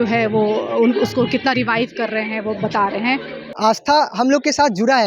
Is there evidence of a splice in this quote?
yes; 1 cut; at 3.4 s

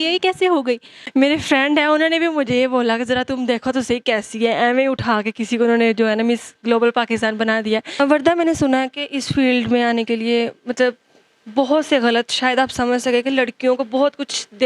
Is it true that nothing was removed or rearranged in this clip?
no; 2 cuts; at 0.9 s, 8.0 s

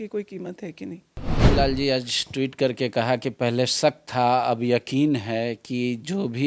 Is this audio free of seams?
no; 1 cut; at 1.4 s

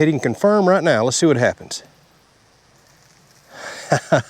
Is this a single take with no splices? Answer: no; 1 cut; at 2.2 s

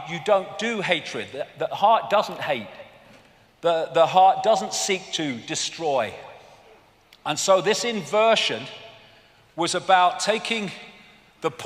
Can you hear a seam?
yes; 1 cut; at 2.2 s

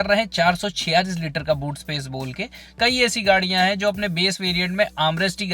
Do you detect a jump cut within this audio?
yes; 1 cut; at 2.7 s

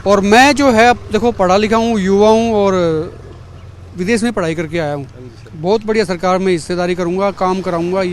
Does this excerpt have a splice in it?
no; 0 cuts

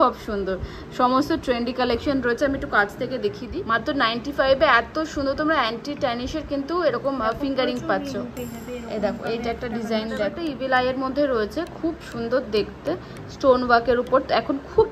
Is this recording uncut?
no; 2 cuts; at 3.4 s, 10.4 s

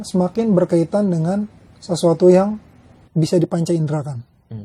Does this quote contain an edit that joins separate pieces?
no; 0 cuts

